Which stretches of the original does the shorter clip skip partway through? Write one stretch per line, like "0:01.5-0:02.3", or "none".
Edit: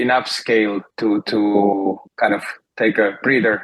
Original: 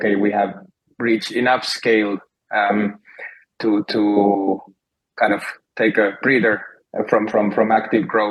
0:02.2-0:03.5
0:04.7-0:05.0